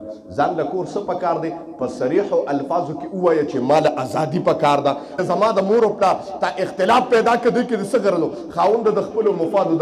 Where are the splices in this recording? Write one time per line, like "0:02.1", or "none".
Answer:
0:05.2